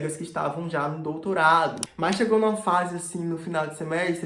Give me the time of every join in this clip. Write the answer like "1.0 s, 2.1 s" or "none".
1.9 s